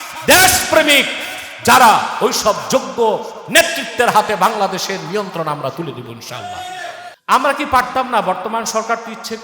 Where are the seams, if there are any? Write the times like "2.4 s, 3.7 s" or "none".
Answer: 7.1 s